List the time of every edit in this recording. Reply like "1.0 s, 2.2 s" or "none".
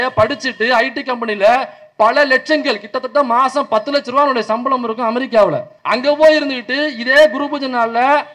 5.7 s